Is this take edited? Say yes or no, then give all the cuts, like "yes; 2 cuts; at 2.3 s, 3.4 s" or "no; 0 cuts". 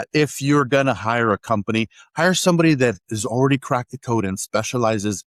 no; 0 cuts